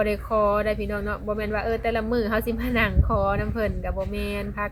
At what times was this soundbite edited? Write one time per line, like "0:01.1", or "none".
none